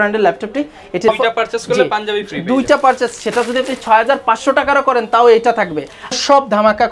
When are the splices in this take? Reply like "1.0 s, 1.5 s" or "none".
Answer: 1.1 s, 6.2 s